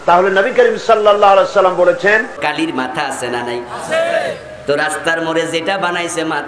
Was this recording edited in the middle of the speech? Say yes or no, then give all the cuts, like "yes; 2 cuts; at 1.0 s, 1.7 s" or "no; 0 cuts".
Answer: yes; 1 cut; at 2.4 s